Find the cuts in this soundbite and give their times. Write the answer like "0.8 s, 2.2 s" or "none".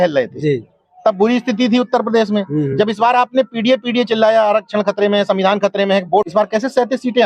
6.3 s

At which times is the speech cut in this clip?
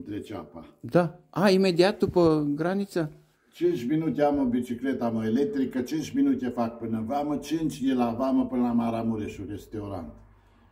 none

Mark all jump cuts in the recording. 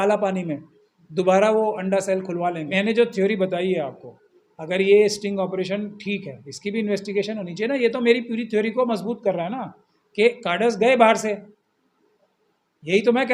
2.7 s

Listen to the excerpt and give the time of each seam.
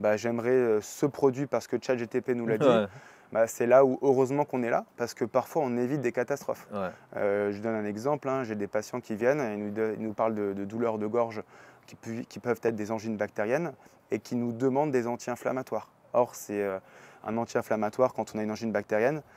none

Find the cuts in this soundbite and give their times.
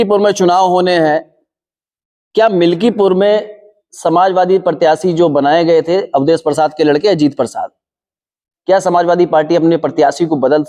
none

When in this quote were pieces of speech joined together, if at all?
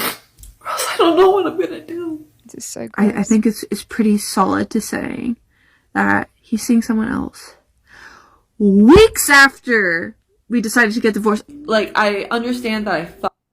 2.3 s, 11.5 s

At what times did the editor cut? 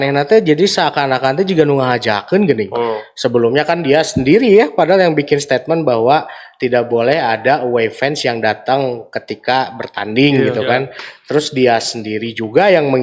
none

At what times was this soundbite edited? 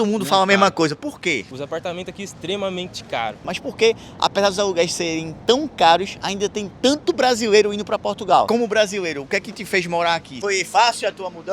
1.5 s, 3.5 s, 8.5 s, 10.3 s

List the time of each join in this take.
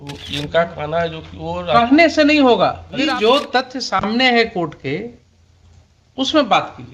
3.1 s

